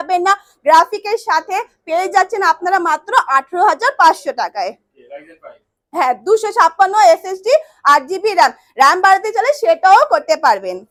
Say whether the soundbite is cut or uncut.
uncut